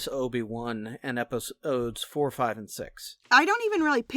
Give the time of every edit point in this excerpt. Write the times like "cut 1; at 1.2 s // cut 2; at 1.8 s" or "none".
cut 1; at 3.2 s